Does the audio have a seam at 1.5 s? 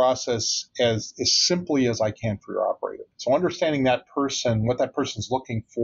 no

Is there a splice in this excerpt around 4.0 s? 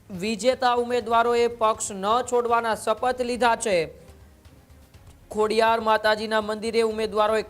no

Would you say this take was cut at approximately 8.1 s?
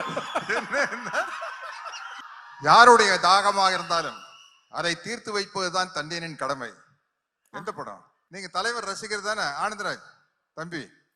yes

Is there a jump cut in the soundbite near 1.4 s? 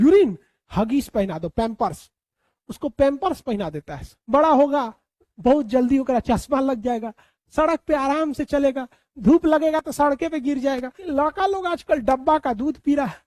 no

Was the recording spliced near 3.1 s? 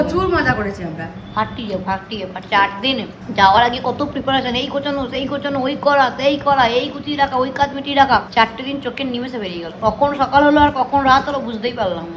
no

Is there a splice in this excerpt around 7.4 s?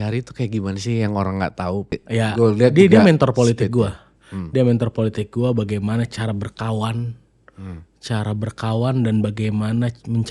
no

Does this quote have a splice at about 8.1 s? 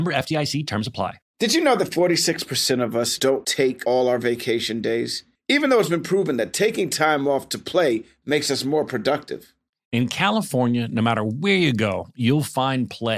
no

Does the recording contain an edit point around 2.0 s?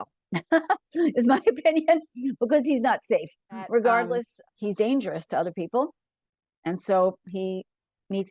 no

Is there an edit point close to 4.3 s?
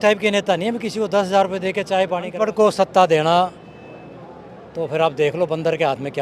no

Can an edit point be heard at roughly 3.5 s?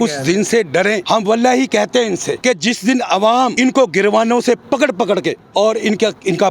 yes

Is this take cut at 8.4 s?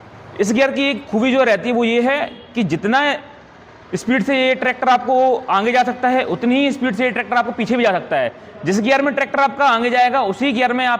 no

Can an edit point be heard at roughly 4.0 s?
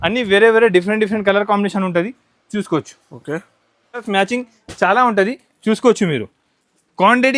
yes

